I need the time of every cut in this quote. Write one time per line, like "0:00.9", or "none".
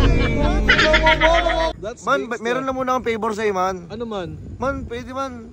0:01.7